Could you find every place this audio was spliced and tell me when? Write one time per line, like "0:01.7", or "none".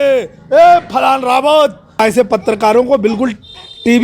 0:02.0